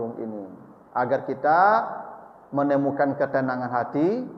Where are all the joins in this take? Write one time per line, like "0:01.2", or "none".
none